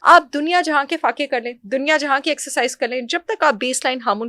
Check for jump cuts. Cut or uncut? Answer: uncut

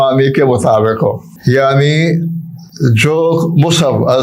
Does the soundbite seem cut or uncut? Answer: cut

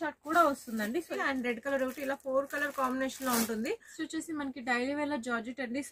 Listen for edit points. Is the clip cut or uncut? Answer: cut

